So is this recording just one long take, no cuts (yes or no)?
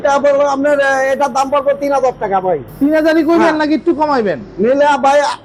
yes